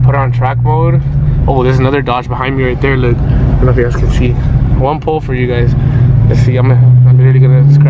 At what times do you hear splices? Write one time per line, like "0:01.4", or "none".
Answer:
none